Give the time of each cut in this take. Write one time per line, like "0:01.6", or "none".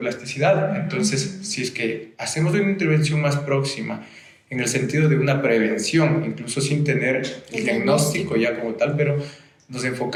none